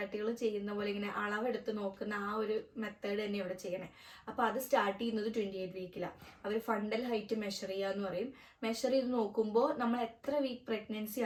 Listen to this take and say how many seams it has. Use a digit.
0